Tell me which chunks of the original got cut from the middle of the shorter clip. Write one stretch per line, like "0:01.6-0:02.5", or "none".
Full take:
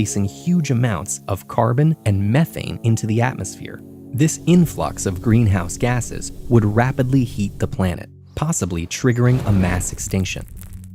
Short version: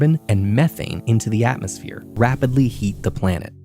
0:03.9-0:06.7